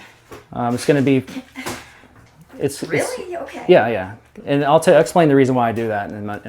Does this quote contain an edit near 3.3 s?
no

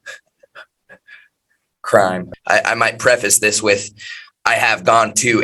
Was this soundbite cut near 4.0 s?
no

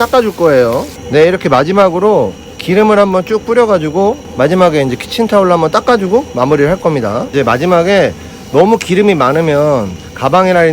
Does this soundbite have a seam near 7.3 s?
yes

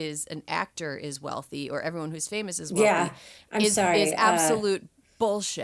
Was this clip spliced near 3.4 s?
no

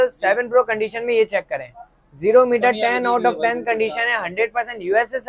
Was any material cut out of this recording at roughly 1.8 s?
no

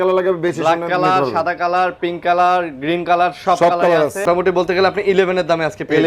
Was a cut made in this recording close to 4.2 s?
yes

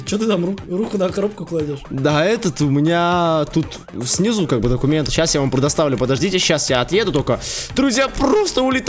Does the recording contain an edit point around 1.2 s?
no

